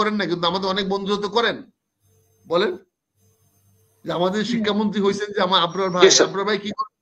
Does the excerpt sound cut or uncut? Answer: uncut